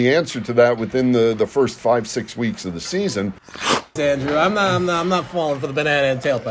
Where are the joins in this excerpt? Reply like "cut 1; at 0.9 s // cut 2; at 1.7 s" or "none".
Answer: cut 1; at 3.7 s